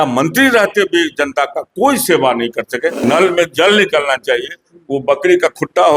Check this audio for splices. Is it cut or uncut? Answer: cut